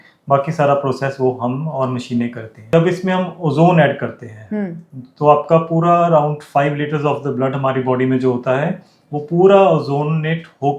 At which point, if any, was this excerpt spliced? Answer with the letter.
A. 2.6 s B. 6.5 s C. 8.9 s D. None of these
A